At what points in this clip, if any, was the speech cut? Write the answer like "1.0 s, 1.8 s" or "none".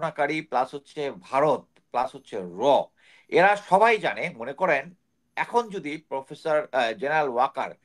none